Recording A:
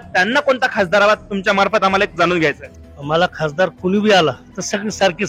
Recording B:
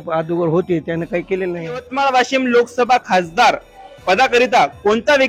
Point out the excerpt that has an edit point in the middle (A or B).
B